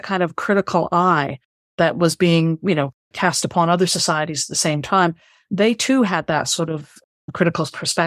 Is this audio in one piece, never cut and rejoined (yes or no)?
yes